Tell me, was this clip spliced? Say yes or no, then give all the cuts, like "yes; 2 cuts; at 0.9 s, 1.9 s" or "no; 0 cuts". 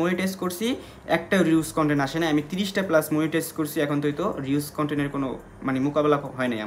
no; 0 cuts